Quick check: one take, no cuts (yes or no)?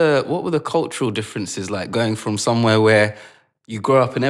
yes